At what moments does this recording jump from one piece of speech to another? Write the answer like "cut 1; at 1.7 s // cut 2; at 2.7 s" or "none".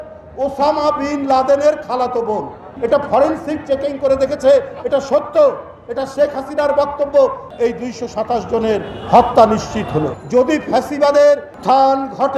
cut 1; at 2.6 s // cut 2; at 7.4 s // cut 3; at 10.2 s